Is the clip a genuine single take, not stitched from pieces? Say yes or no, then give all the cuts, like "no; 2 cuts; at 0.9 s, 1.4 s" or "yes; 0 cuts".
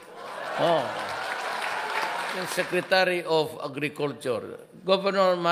no; 1 cut; at 2.4 s